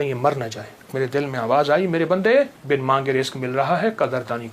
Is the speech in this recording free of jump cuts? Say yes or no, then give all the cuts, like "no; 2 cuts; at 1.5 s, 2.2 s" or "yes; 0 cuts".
no; 2 cuts; at 0.9 s, 2.6 s